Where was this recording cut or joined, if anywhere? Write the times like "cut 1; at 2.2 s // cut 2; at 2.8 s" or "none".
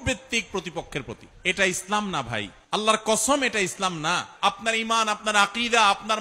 cut 1; at 1.3 s // cut 2; at 2.5 s // cut 3; at 4.3 s

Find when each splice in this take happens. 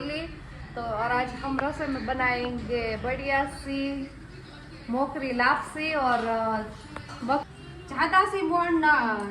cut 1; at 7.5 s

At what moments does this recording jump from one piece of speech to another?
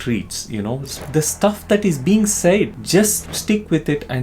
cut 1; at 1.0 s // cut 2; at 2.7 s

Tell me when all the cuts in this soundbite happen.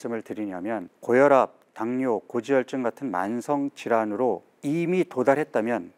cut 1; at 0.9 s // cut 2; at 4.5 s

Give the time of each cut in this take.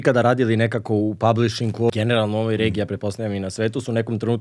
cut 1; at 1.9 s

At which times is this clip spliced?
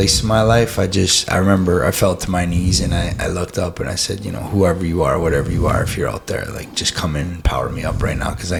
none

